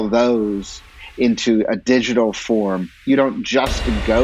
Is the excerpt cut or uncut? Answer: cut